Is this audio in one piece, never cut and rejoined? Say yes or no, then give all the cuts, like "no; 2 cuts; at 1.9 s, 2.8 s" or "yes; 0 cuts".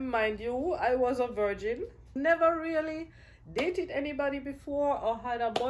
no; 1 cut; at 2.1 s